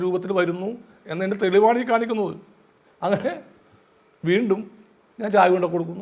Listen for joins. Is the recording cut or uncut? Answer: uncut